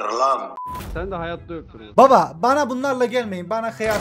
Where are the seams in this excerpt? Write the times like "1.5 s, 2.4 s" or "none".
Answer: 1.8 s